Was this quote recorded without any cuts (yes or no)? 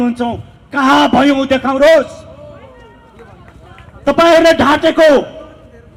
yes